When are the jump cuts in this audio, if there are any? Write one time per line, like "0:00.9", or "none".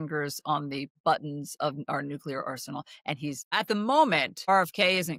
0:00.9
0:03.5
0:04.4